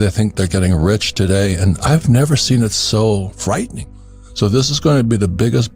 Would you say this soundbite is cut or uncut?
cut